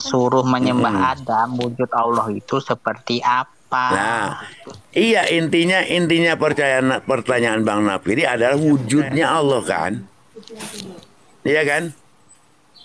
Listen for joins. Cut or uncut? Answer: uncut